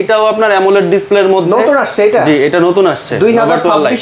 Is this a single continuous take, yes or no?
yes